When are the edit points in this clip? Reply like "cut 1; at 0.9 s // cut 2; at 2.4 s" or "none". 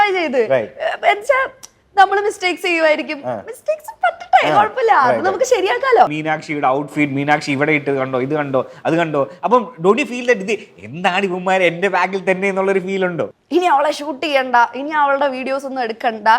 cut 1; at 6.1 s // cut 2; at 13.4 s